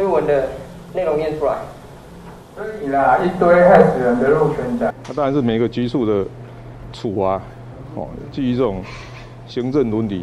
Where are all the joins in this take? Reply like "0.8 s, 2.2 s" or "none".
5.0 s